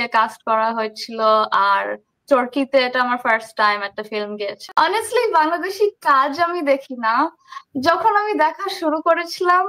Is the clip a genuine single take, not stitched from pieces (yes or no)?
no